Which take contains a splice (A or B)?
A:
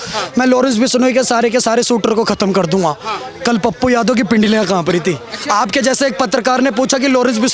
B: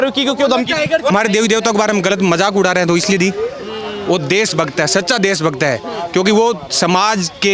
B